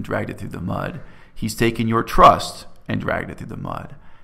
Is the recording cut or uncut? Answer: uncut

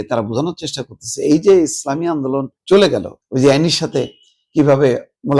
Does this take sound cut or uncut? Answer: cut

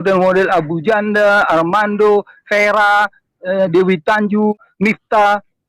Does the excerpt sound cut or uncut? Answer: cut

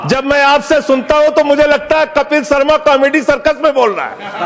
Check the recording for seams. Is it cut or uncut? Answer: uncut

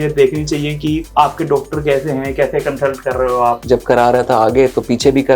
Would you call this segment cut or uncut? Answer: cut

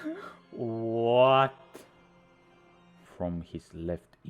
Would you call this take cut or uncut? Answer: cut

